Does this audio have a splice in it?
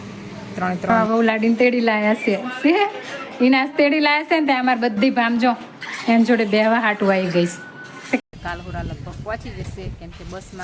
yes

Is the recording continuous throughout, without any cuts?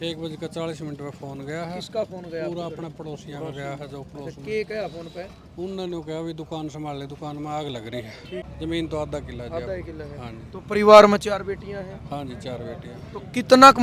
no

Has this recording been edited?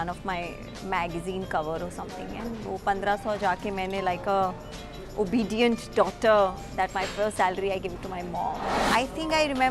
yes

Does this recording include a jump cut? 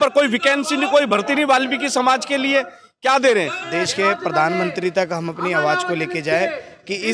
yes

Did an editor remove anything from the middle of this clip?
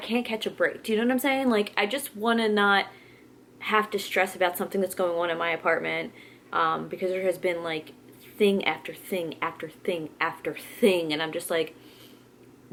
no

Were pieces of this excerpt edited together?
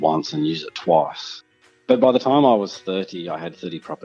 yes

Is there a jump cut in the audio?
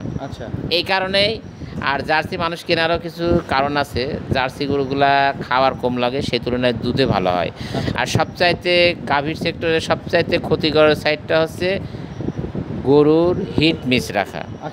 no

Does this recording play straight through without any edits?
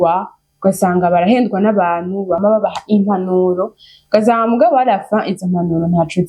no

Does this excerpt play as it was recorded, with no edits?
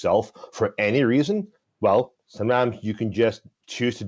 no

